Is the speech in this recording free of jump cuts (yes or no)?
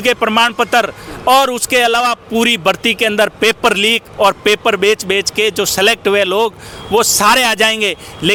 yes